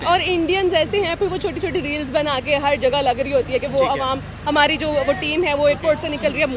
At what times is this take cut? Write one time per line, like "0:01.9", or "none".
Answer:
none